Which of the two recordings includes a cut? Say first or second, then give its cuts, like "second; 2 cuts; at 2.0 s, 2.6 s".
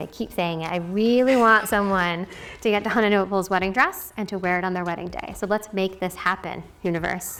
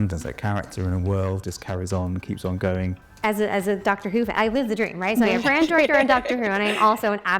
second; 1 cut; at 3.0 s